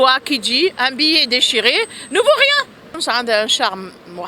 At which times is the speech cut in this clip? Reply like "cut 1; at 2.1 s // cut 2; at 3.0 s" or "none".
cut 1; at 2.9 s

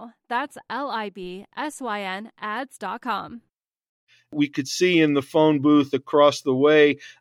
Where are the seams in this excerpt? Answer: cut 1; at 4.3 s

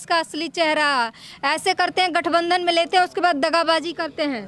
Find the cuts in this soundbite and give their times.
none

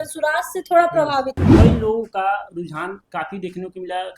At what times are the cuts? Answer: cut 1; at 1.4 s

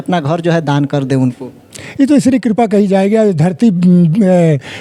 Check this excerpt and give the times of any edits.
none

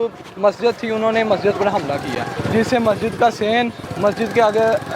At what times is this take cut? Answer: cut 1; at 2.3 s // cut 2; at 3.8 s

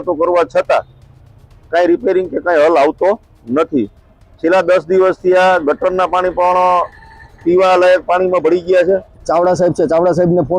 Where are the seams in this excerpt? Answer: cut 1; at 9.1 s

